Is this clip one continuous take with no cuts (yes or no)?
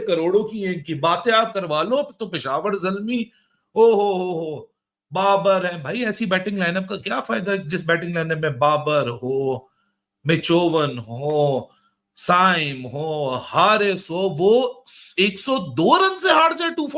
yes